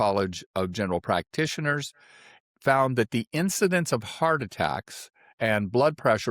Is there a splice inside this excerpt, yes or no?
no